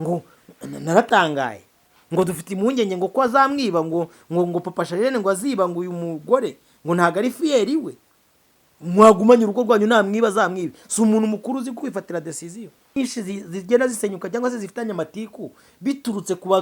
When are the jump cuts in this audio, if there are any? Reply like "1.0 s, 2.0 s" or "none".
13.0 s

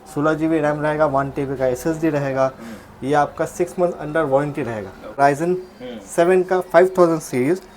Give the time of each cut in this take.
5.2 s

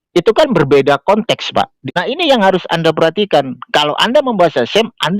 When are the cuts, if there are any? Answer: 1.8 s

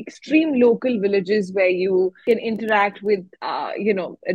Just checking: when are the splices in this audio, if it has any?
2.2 s, 3.4 s

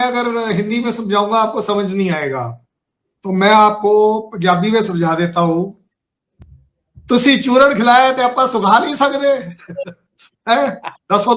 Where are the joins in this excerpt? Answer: none

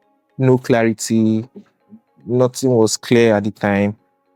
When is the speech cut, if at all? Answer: none

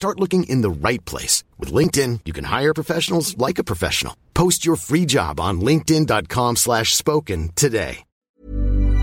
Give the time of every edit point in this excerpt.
8.1 s

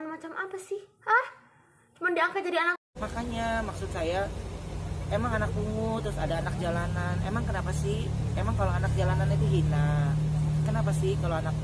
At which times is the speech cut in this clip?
2.8 s

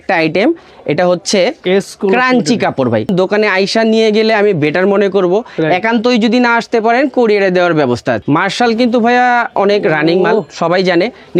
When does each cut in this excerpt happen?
3.1 s, 8.2 s

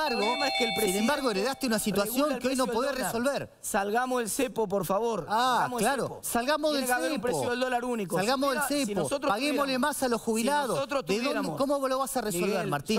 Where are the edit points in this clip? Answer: none

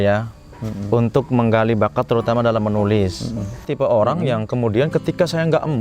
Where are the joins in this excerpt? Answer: 3.7 s

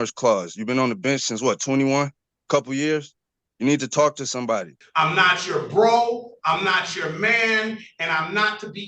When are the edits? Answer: 4.8 s

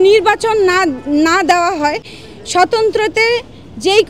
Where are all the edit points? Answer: none

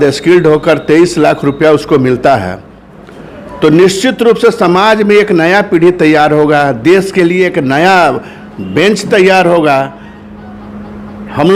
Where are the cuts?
none

